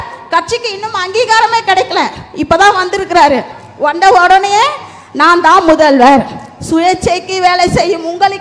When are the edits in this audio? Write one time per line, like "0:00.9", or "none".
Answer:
none